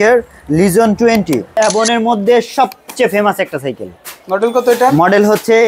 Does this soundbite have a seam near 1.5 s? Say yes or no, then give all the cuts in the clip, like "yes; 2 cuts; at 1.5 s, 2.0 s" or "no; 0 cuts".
yes; 1 cut; at 1.5 s